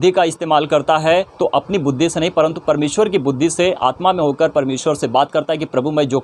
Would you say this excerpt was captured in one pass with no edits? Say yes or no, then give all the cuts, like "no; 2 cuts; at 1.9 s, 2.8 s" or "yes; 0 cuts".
no; 1 cut; at 2.6 s